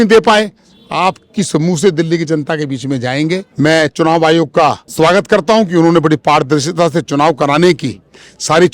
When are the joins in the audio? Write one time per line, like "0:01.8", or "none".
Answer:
0:03.4
0:04.8